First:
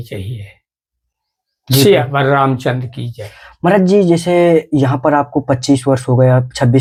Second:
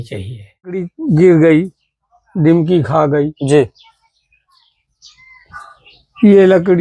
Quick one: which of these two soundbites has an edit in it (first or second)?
second